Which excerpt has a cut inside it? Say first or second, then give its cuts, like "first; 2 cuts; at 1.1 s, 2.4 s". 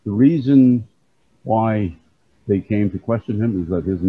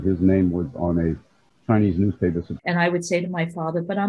second; 1 cut; at 2.5 s